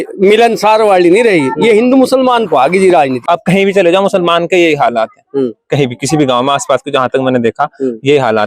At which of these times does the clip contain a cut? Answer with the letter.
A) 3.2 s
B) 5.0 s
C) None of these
A